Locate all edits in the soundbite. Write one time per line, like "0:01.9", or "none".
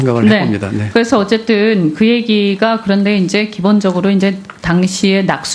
0:01.7